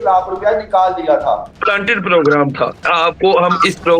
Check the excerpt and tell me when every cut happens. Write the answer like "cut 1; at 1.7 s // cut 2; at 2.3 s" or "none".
cut 1; at 1.6 s // cut 2; at 2.8 s